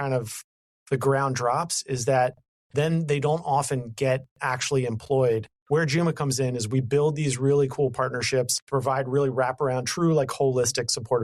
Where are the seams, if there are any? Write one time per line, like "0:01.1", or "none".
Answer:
0:05.5
0:08.6